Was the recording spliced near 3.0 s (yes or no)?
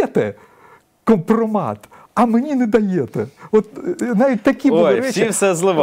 no